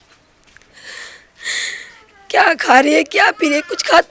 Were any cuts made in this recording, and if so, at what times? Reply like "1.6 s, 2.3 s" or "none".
none